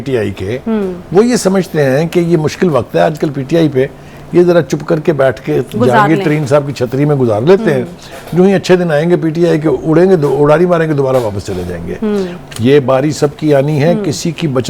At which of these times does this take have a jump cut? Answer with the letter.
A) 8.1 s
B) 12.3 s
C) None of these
B